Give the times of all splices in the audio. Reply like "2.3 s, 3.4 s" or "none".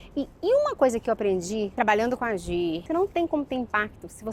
2.8 s